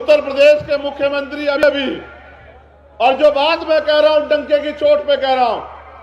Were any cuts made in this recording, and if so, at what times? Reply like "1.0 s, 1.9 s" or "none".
1.6 s